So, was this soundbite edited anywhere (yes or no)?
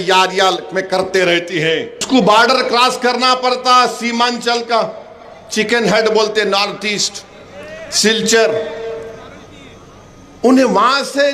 yes